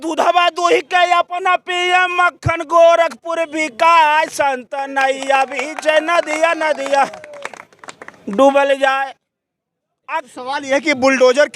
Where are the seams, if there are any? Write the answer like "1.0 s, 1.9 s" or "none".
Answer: 10.1 s

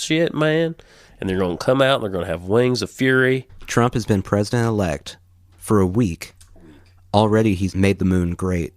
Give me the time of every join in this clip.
3.5 s, 7.7 s

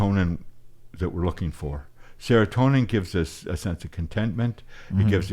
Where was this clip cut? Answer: none

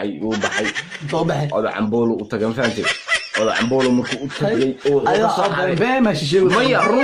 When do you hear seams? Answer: none

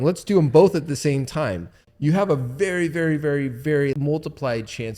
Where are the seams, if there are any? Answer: 1.8 s, 4.0 s

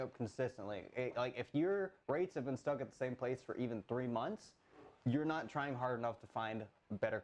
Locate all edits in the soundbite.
none

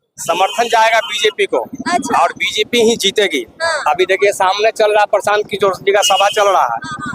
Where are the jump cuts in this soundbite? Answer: none

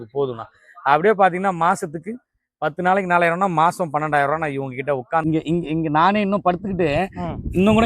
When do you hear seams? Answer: 5.2 s

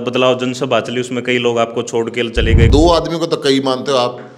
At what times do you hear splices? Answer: 2.7 s

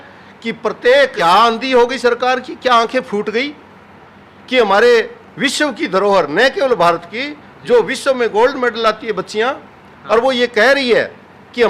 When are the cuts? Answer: 1.1 s

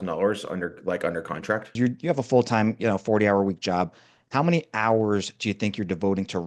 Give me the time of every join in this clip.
1.8 s

